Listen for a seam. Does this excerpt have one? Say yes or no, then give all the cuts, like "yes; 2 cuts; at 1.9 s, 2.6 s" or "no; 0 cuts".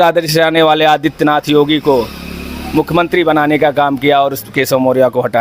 no; 0 cuts